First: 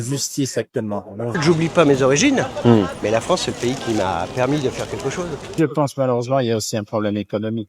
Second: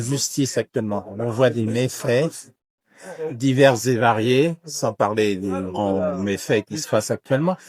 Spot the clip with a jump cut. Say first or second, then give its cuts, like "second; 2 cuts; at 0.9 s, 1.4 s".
first; 2 cuts; at 1.4 s, 5.5 s